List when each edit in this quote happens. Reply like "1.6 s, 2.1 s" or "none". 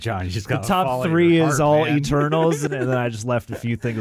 2.6 s